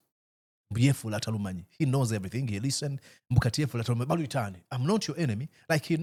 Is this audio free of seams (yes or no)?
yes